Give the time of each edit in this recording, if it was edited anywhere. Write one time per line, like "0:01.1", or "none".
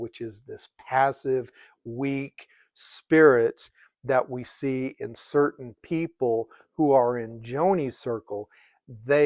none